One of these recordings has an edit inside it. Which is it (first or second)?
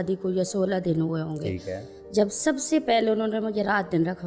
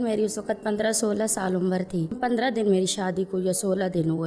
second